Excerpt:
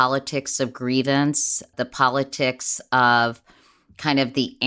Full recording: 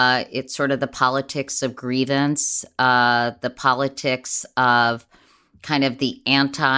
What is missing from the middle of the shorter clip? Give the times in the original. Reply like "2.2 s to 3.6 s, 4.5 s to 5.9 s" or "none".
2.7 s to 3.3 s